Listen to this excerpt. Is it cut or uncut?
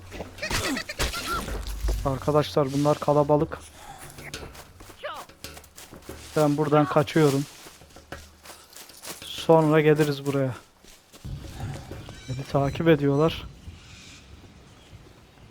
cut